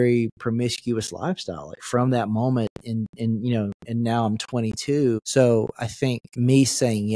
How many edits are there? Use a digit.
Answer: 2